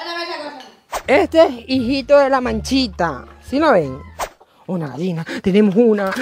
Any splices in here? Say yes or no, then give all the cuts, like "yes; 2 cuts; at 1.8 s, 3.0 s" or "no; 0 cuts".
yes; 2 cuts; at 1.0 s, 4.3 s